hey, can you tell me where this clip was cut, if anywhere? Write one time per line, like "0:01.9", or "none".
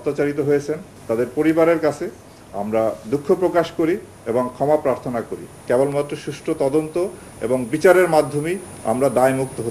0:00.9
0:05.5